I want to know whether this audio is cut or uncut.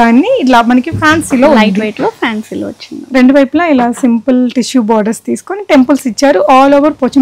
uncut